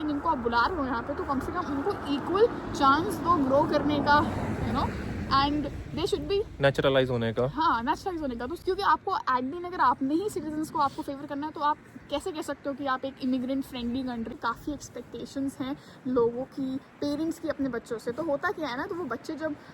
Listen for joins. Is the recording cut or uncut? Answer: cut